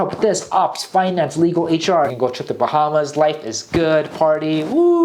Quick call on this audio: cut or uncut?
cut